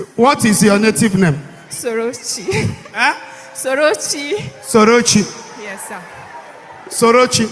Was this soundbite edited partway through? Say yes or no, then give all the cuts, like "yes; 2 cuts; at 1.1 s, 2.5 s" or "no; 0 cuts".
no; 0 cuts